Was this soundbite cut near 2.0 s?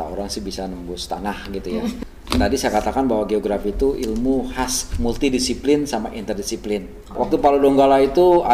yes; 2 cuts; at 2.0 s, 7.2 s

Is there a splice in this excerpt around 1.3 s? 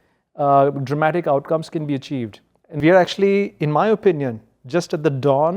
no; 1 cut; at 2.8 s

